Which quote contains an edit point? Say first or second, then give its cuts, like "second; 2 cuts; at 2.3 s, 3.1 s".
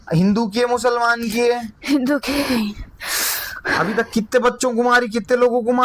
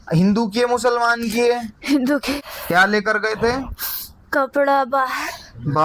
second; 1 cut; at 2.4 s